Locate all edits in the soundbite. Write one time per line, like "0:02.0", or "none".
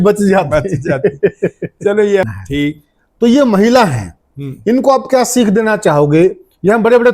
0:02.3